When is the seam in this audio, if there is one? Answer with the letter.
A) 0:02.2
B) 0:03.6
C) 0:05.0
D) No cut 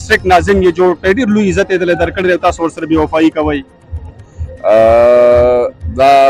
D